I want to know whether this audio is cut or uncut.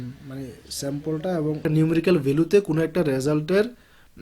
cut